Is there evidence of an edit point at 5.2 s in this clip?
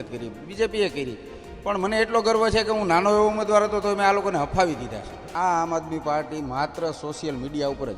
yes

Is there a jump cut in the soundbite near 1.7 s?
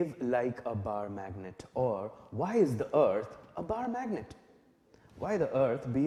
no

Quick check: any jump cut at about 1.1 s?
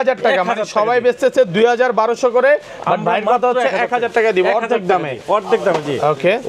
no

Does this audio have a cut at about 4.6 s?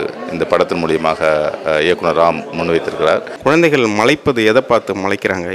no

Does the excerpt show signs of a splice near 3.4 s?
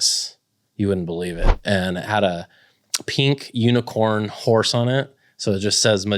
no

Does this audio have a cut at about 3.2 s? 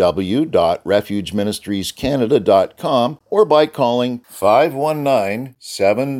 yes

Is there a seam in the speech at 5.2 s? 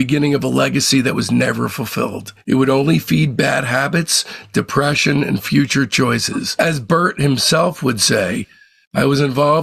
no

